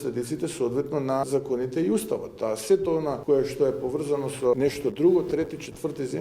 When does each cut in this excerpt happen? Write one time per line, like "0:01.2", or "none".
0:01.2
0:03.2
0:04.6